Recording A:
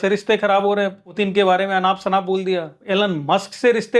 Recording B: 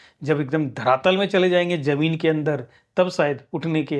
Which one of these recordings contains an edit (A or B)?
A